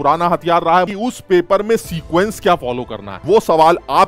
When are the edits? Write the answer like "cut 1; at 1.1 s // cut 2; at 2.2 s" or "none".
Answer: cut 1; at 0.9 s // cut 2; at 3.2 s